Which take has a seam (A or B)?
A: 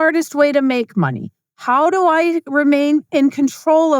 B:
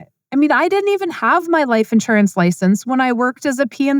A